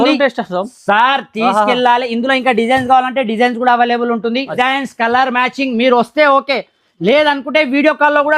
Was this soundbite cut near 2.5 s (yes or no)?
no